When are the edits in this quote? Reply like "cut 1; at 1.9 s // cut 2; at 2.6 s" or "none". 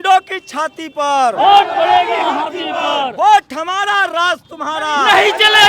none